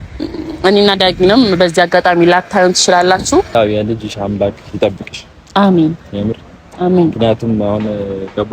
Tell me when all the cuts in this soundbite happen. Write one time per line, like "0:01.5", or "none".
0:03.5